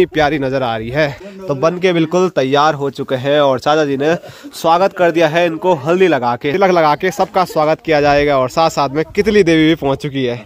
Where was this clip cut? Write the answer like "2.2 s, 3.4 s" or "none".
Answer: 1.3 s, 6.5 s